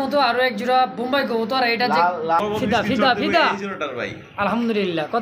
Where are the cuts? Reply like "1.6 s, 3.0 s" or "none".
2.4 s